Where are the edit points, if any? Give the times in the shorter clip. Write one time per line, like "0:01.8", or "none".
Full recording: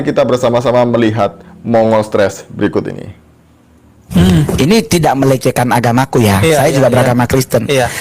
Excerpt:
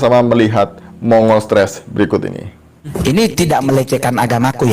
0:03.0